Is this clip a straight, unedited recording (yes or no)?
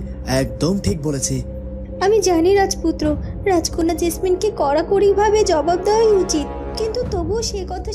yes